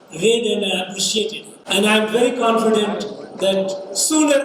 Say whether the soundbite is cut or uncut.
cut